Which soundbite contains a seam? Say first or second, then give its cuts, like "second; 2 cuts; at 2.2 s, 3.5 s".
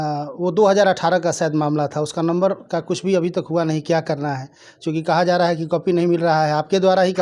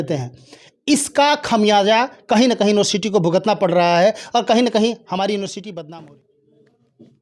second; 1 cut; at 5.8 s